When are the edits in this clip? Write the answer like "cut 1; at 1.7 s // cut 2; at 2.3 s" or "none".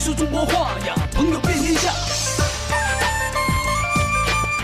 none